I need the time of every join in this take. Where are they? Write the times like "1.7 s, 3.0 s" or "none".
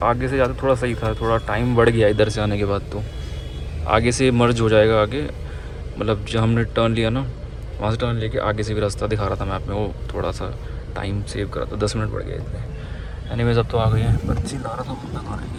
none